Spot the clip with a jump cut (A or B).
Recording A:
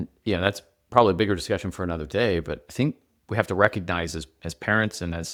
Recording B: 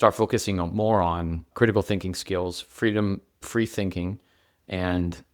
B